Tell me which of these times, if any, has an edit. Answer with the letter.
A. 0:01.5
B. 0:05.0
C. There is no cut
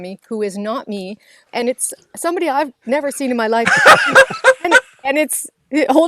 A